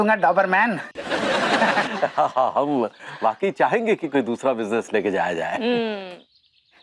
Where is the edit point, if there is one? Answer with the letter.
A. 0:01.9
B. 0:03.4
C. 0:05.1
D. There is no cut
A